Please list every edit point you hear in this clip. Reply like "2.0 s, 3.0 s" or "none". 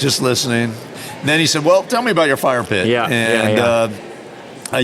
0.9 s